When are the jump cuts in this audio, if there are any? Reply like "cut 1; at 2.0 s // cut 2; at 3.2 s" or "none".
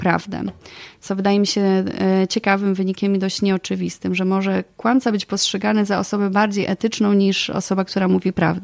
none